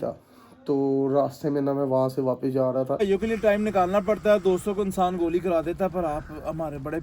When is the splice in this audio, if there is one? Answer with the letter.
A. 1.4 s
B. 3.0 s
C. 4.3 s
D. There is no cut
B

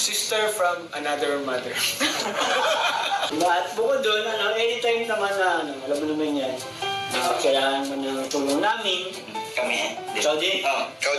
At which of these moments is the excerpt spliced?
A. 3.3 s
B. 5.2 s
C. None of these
A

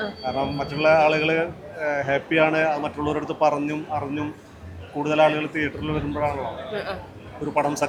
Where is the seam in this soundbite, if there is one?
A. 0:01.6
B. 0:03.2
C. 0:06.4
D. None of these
D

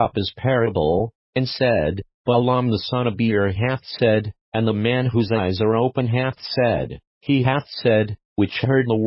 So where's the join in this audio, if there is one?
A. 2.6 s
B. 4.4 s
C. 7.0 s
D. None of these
D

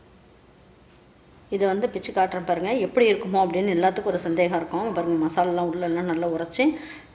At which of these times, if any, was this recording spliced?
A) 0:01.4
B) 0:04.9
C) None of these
A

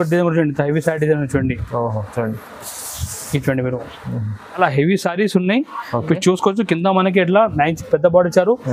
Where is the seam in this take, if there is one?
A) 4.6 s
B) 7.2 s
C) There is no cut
A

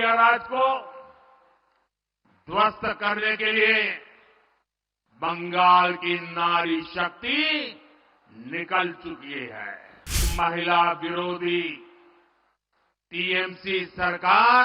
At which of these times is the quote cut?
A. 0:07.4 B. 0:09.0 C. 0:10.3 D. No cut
C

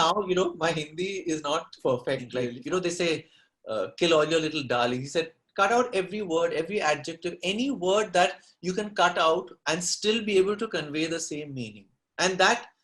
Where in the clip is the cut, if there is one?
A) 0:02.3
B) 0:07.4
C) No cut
A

